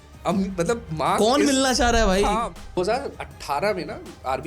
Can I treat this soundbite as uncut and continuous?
no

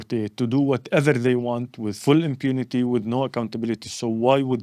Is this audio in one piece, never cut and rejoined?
yes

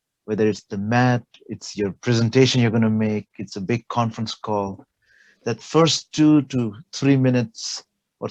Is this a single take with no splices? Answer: yes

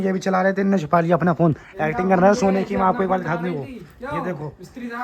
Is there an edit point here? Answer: no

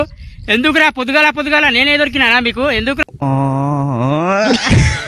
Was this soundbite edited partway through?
yes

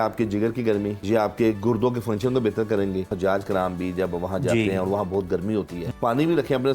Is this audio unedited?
no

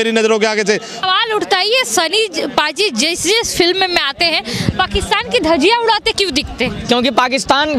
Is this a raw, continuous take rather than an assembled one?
no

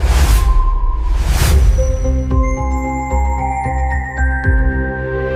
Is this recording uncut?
yes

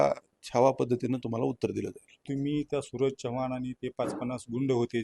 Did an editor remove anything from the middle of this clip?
yes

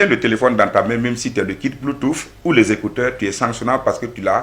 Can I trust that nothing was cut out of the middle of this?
yes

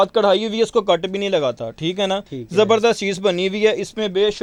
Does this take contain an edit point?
no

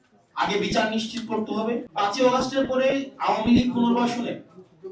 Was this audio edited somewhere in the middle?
yes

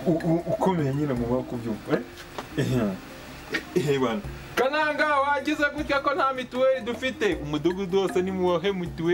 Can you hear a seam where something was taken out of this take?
no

